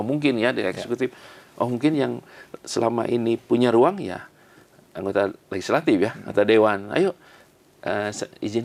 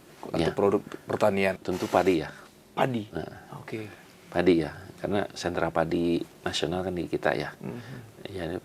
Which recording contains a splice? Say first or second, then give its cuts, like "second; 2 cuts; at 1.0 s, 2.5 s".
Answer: second; 1 cut; at 1.6 s